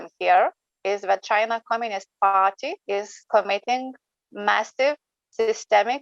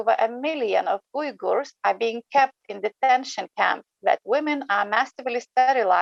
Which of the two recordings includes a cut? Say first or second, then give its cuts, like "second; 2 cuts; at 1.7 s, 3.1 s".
first; 1 cut; at 2.7 s